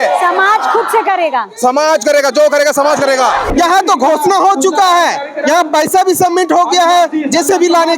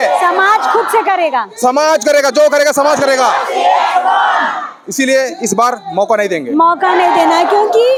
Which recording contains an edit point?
first; 1 cut; at 3.5 s

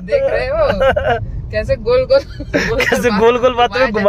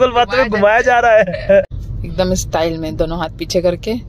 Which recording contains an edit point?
second; 1 cut; at 1.6 s

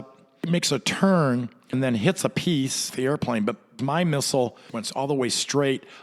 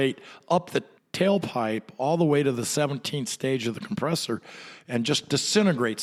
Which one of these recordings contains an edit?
first; 4 cuts; at 1.7 s, 2.9 s, 3.8 s, 4.8 s

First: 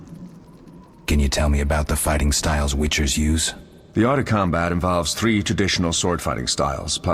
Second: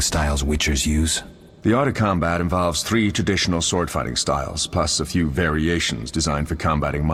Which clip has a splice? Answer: first; 1 cut; at 1.0 s

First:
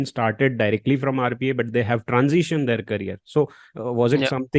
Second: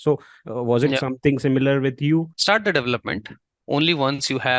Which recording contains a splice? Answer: second; 1 cut; at 2.3 s

